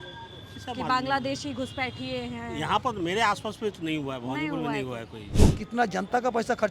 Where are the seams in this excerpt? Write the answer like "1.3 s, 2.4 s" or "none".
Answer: 5.2 s

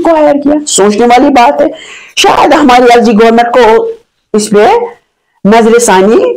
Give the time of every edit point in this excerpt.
none

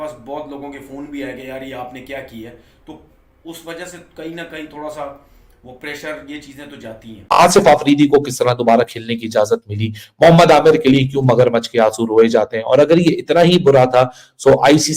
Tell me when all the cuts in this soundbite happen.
7.1 s

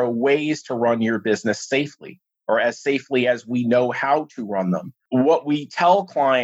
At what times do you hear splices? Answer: 4.9 s

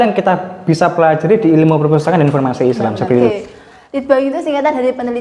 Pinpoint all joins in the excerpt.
3.3 s

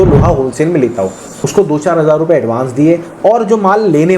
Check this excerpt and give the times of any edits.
1.3 s

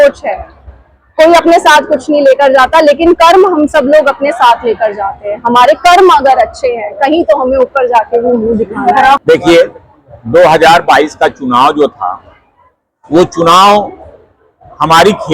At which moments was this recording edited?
9.2 s

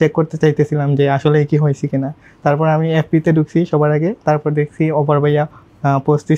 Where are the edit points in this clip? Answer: none

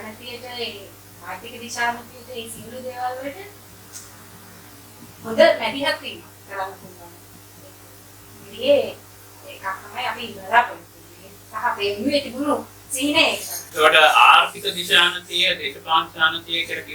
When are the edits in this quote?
none

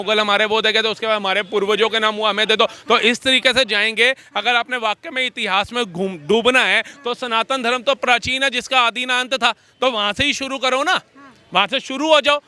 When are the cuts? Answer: none

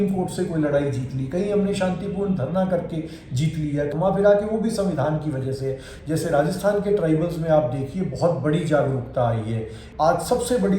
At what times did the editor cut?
3.9 s, 5.9 s, 9.8 s

